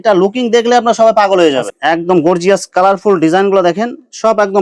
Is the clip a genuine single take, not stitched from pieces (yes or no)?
no